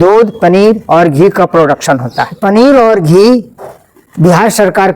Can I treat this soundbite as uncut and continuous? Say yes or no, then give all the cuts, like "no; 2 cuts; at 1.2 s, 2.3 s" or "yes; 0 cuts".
no; 1 cut; at 2.3 s